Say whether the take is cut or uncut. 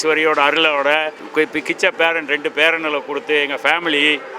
cut